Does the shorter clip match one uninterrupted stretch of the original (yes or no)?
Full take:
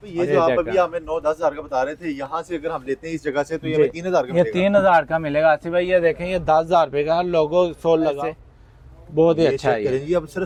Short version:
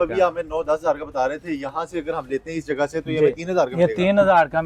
yes